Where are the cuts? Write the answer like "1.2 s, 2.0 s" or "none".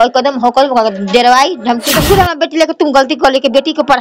1.9 s

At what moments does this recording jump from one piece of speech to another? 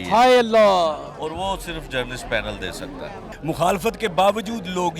3.2 s

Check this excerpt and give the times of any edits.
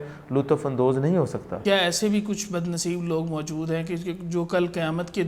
1.6 s

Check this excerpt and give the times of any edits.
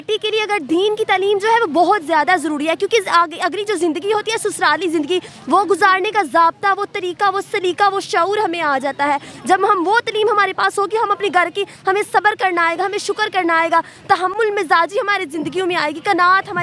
none

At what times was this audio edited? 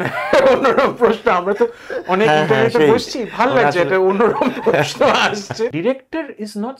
5.7 s

